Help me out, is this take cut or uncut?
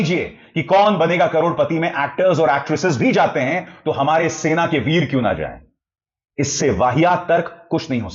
uncut